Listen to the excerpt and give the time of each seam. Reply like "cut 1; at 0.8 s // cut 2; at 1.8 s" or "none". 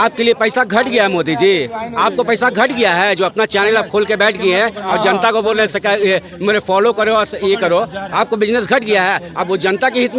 none